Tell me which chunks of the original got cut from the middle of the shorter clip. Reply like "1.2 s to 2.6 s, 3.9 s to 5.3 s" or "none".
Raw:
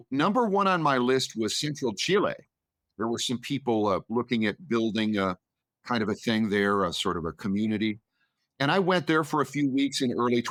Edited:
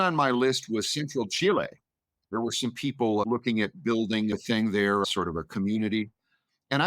3.9 s to 4.1 s, 5.2 s to 6.1 s, 6.8 s to 6.9 s